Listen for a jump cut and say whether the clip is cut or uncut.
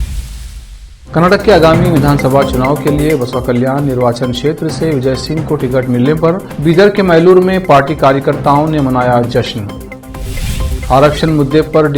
cut